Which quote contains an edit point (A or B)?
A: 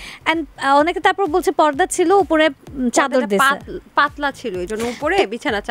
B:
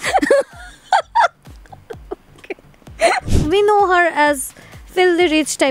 B